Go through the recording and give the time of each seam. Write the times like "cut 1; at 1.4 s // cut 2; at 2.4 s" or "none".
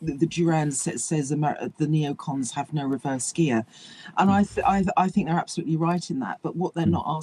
none